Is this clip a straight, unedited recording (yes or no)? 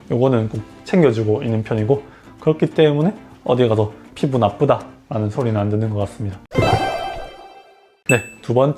yes